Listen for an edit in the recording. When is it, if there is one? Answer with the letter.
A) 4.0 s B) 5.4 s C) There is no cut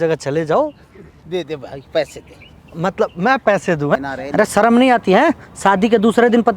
A